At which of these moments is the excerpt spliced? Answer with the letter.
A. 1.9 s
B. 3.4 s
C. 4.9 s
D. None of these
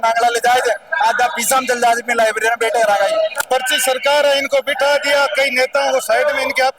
B